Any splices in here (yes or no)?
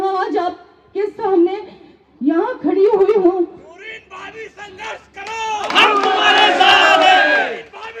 no